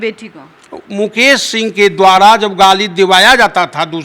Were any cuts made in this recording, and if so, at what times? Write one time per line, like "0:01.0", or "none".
none

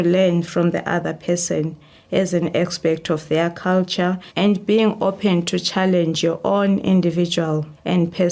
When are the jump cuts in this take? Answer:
0:04.3

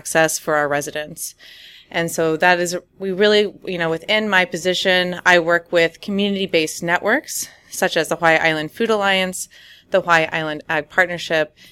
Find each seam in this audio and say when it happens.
none

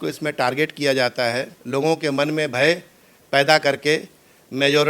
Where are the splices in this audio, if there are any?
0:01.5

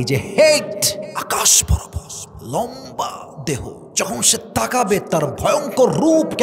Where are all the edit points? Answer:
0:01.1
0:03.8

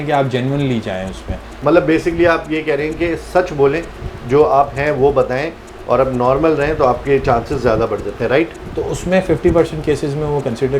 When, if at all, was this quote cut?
0:01.5
0:08.6

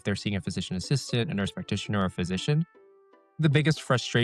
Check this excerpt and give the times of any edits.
0:02.7

